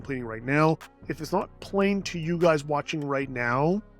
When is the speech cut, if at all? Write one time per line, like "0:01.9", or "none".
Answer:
0:01.1